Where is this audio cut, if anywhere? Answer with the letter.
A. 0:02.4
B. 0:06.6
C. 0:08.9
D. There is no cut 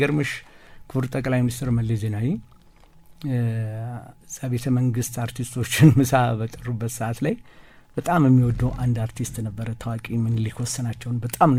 D